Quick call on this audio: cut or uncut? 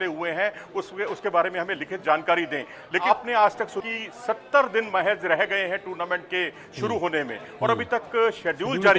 cut